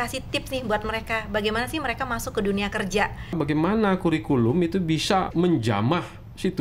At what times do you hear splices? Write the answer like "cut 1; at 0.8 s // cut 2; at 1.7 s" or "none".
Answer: cut 1; at 3.3 s // cut 2; at 5.3 s